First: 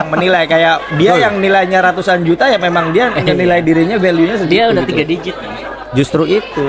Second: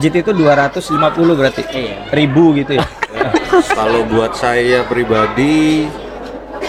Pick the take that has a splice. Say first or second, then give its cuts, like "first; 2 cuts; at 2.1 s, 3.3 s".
second; 1 cut; at 3.8 s